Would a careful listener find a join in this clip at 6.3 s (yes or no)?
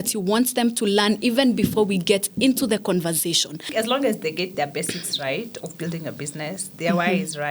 no